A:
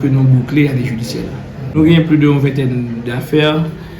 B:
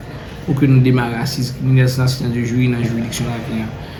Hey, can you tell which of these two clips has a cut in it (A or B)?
A